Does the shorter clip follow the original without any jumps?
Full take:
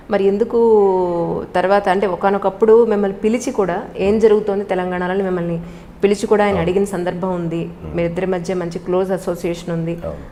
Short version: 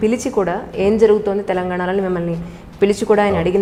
yes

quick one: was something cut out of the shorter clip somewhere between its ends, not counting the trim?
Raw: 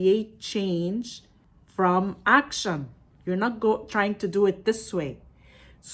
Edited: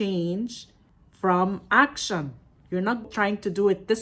yes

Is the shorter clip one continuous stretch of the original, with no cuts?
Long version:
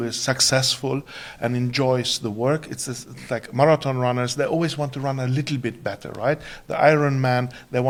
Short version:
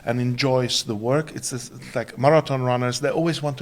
yes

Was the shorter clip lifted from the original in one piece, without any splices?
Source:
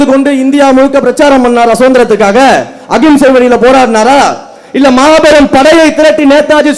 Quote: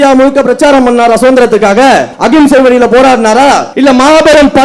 no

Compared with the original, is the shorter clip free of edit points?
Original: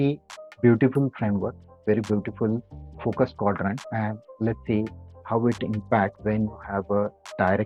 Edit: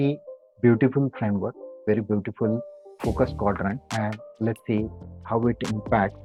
yes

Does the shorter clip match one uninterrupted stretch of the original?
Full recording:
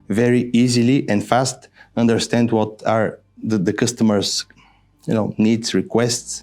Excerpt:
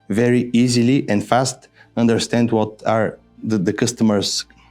yes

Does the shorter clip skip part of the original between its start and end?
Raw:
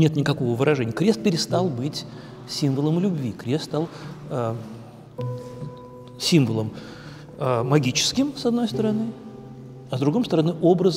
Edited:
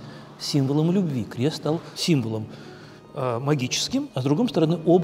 yes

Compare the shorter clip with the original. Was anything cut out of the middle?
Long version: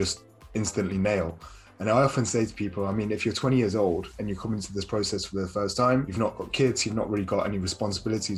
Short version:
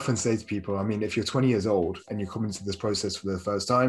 no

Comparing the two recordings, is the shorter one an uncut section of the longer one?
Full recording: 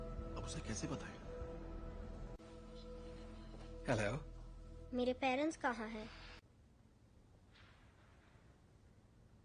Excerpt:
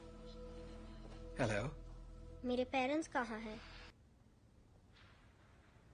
no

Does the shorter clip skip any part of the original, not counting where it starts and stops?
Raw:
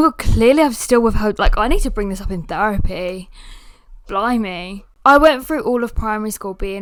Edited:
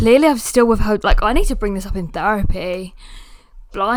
no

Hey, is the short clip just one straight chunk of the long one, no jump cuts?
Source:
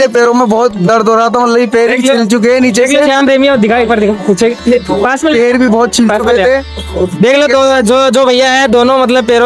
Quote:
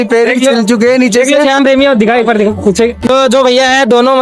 no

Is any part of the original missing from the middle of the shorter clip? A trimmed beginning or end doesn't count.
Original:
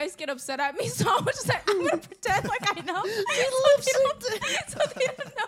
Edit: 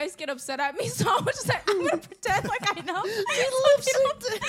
no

